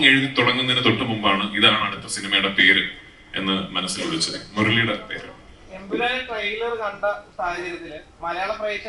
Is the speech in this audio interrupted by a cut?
no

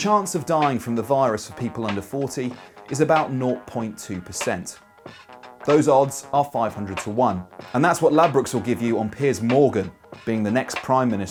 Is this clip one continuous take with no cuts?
yes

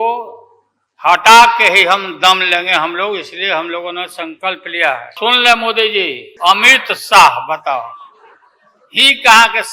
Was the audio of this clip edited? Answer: yes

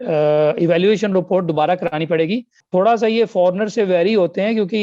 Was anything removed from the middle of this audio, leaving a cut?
yes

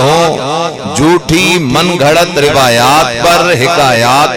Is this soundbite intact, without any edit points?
yes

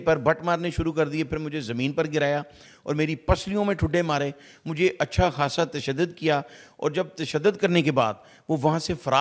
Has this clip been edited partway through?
no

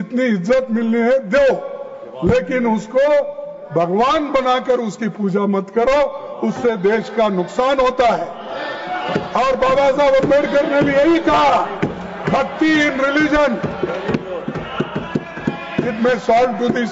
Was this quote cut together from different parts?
no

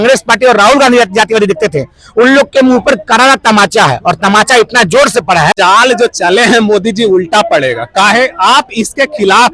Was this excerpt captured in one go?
no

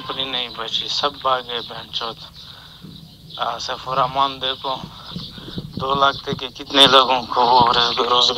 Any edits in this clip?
no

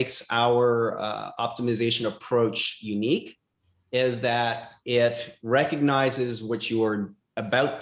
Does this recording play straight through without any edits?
yes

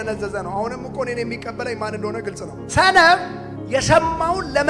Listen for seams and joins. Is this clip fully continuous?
yes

